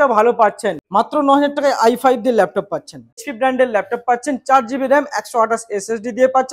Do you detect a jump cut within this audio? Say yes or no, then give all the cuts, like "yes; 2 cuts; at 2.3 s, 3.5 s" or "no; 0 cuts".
yes; 2 cuts; at 0.8 s, 3.3 s